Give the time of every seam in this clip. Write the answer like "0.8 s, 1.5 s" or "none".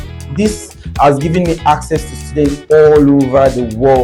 none